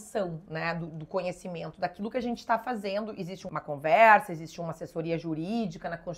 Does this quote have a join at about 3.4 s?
yes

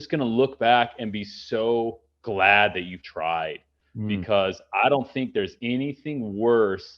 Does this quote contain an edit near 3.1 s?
yes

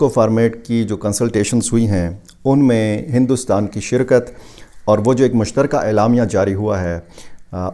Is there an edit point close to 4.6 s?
no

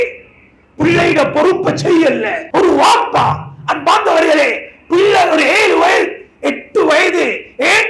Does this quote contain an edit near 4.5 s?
no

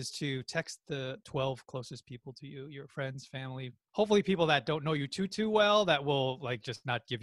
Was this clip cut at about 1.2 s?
yes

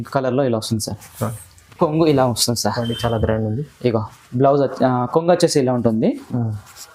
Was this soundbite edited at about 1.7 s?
yes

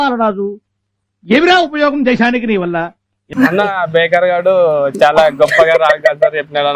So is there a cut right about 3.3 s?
yes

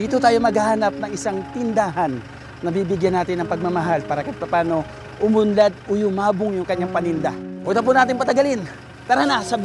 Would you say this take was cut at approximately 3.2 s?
no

